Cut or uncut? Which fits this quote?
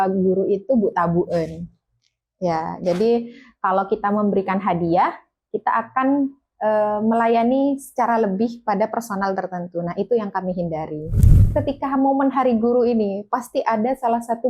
cut